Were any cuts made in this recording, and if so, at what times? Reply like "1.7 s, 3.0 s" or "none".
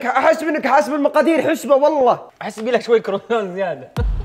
2.3 s